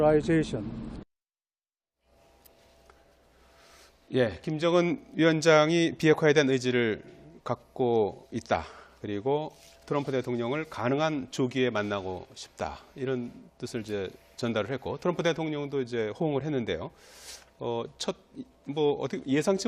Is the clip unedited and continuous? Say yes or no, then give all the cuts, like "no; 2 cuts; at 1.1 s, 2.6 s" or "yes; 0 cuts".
yes; 0 cuts